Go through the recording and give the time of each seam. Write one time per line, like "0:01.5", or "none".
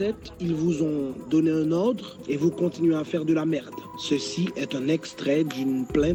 none